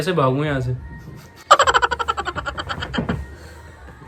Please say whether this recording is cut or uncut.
uncut